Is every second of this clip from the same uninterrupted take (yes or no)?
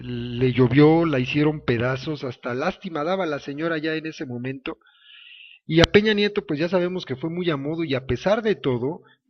yes